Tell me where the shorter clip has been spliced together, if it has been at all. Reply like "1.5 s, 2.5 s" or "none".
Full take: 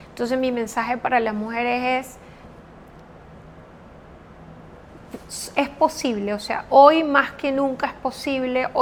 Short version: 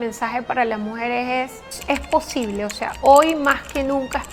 1.7 s